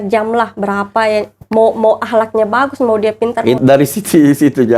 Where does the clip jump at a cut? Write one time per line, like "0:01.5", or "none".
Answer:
0:03.6